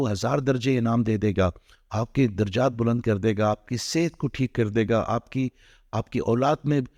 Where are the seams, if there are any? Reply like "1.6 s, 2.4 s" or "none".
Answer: none